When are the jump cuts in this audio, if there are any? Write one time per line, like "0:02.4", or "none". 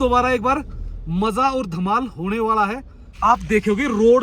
0:03.1